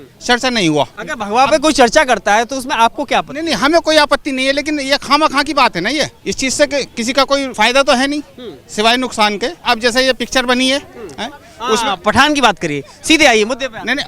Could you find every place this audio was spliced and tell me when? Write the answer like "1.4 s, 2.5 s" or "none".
1.0 s, 6.2 s, 7.5 s, 9.6 s